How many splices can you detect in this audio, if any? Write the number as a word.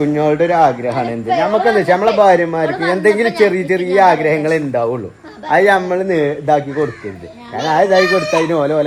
zero